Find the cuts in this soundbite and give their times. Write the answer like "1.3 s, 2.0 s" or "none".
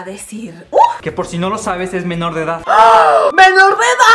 1.0 s